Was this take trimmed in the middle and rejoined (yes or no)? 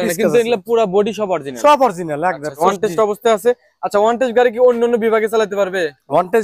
yes